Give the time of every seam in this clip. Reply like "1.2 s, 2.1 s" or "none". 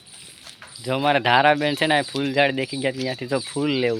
none